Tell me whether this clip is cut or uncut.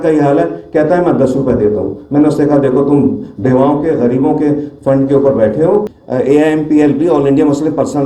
cut